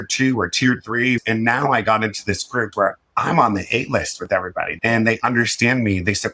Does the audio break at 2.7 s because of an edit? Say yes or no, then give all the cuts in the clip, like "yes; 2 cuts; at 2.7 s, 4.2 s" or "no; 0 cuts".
yes; 3 cuts; at 1.2 s, 2.7 s, 4.7 s